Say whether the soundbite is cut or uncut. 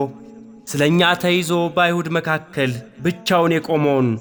uncut